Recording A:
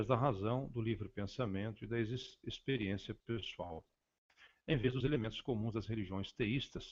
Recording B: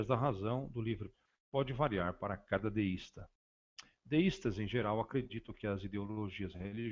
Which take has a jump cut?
A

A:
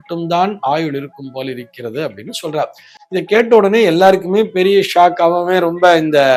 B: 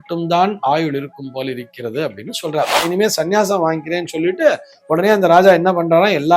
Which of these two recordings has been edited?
B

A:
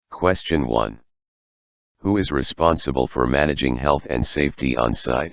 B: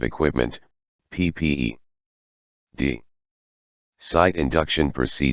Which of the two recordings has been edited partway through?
A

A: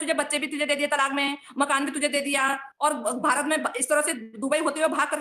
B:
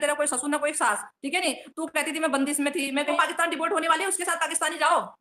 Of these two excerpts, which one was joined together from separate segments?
B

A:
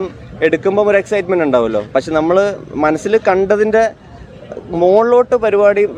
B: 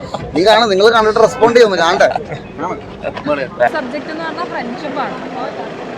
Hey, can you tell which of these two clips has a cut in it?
B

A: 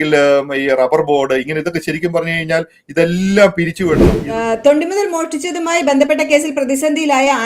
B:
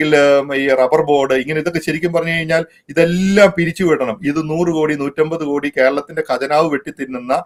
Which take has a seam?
A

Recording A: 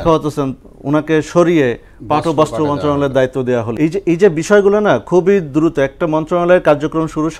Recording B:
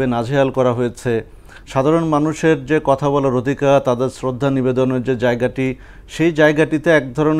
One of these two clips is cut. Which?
A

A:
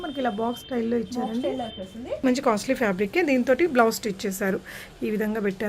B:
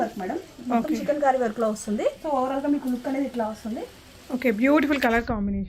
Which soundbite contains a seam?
A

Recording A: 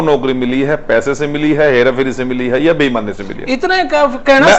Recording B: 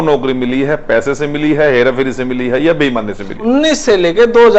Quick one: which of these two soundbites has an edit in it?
B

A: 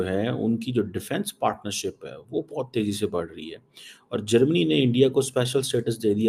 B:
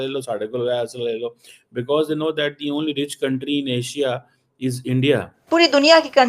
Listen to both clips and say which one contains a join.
B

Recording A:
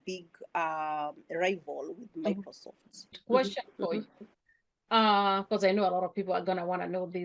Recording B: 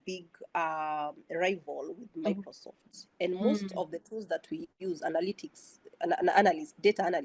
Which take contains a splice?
A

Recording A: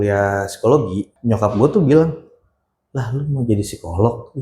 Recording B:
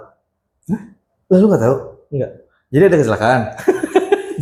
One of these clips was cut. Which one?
A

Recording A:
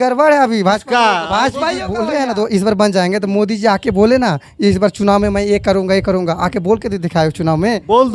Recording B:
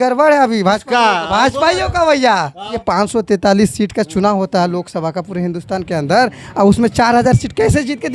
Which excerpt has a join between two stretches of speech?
A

